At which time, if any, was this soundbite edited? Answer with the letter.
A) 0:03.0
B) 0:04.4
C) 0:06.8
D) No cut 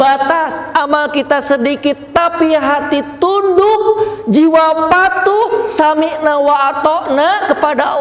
D